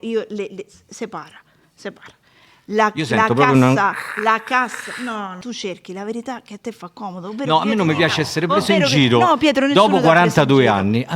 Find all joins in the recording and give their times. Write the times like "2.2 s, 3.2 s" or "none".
5.4 s